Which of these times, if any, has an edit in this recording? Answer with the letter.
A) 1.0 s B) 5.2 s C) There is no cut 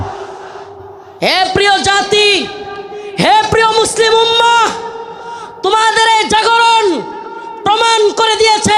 A